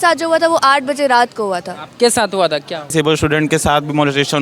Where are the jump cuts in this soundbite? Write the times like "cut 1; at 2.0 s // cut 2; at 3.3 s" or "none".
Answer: cut 1; at 2.9 s